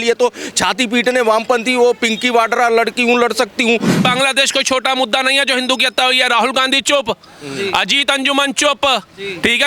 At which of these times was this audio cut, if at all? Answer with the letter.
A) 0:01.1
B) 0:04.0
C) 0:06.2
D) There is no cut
B